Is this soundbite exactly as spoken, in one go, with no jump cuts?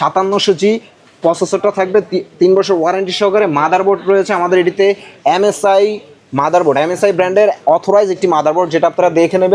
yes; 0 cuts

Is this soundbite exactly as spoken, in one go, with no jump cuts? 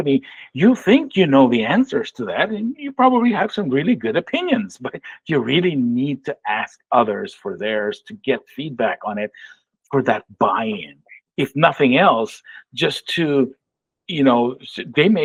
yes; 0 cuts

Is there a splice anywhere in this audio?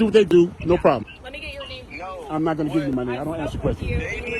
yes; 1 cut; at 1.1 s

